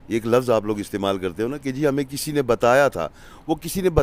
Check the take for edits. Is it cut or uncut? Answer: uncut